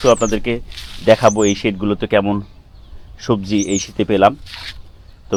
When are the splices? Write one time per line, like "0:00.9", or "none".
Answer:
none